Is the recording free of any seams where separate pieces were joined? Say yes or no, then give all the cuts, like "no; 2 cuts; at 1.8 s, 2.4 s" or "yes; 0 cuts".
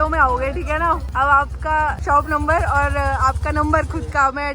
no; 2 cuts; at 1.1 s, 2.0 s